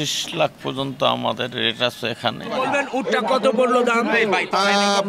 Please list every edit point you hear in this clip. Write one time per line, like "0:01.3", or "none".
0:02.6